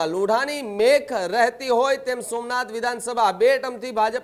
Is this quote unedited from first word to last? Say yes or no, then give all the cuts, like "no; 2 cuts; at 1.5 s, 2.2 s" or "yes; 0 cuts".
yes; 0 cuts